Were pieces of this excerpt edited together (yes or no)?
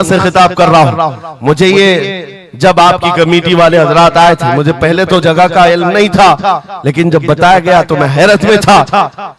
no